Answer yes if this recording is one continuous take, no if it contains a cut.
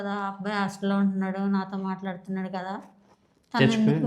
yes